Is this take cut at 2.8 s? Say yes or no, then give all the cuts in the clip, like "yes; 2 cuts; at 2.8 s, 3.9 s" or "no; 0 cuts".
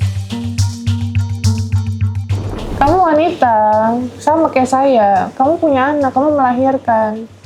yes; 1 cut; at 2.8 s